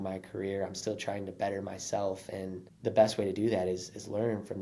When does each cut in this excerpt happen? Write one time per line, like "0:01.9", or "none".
0:02.7